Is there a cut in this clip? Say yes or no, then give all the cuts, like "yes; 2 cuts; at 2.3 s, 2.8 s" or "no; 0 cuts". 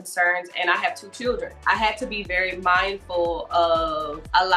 yes; 1 cut; at 1.6 s